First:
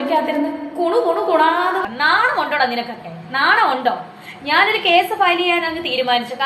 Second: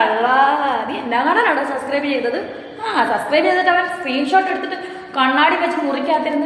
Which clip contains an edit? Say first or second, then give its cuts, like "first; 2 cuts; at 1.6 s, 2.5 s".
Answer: first; 1 cut; at 1.8 s